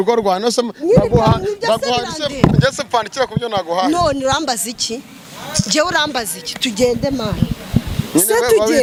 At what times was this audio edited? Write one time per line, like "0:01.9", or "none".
none